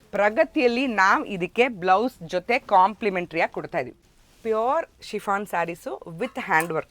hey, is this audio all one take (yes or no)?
no